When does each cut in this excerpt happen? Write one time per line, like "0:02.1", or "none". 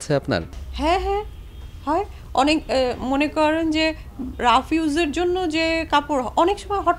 none